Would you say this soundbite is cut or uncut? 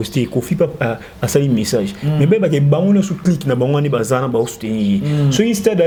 uncut